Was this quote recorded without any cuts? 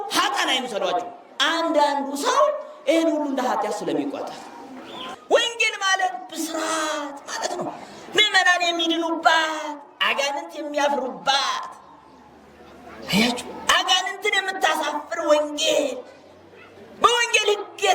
no; 1 cut; at 5.1 s

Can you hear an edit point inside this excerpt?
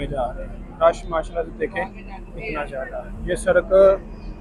no; 0 cuts

